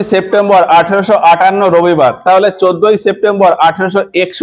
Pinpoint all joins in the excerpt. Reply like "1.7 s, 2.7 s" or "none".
none